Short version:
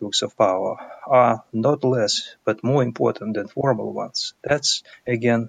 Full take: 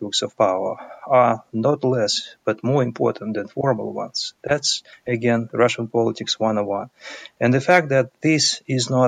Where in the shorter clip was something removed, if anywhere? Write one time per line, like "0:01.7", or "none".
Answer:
none